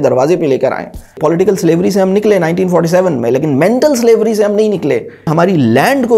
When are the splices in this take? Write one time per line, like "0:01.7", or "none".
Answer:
0:01.2
0:05.3

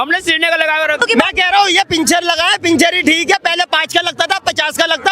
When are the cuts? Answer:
0:01.0

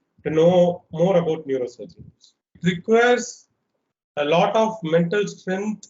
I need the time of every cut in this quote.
0:02.5

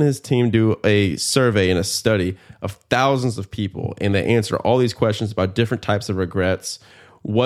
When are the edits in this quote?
none

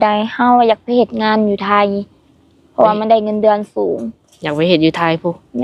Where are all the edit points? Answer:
none

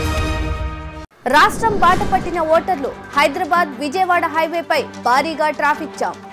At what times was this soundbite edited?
0:00.9

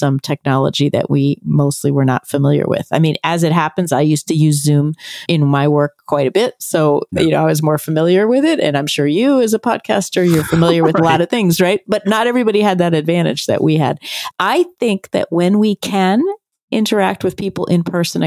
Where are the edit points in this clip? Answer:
0:05.2
0:14.1

